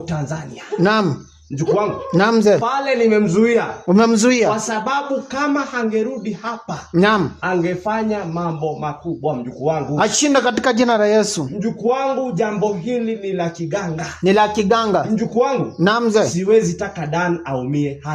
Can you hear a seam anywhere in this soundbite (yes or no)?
no